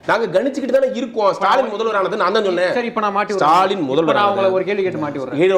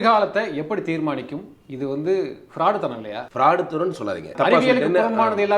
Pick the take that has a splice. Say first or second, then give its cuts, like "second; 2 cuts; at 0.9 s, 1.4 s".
second; 2 cuts; at 3.2 s, 4.3 s